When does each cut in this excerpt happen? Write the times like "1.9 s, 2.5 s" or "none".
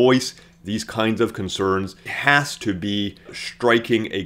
2.1 s, 3.4 s